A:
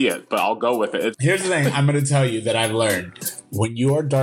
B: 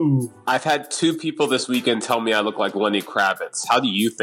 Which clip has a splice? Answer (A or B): A